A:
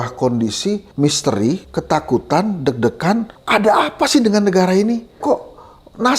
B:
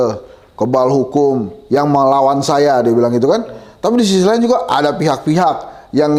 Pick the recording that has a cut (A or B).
A